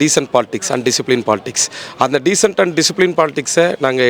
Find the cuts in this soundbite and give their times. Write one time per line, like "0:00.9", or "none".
none